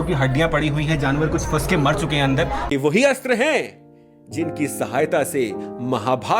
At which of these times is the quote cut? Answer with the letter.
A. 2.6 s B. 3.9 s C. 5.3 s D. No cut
A